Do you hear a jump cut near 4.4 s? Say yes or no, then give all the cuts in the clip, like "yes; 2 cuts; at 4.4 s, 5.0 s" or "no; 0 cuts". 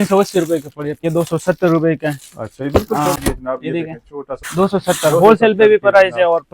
yes; 3 cuts; at 1.0 s, 3.2 s, 4.4 s